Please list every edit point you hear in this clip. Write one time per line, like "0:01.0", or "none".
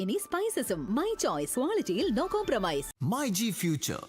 0:02.9